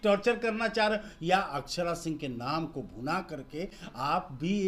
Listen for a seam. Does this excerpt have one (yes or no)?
no